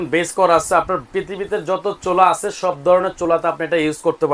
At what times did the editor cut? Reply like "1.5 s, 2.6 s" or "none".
none